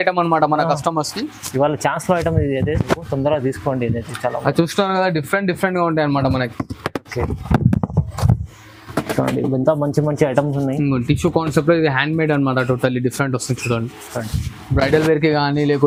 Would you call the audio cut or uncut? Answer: uncut